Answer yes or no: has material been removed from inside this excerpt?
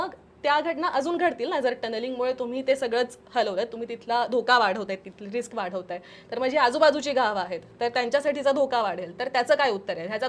no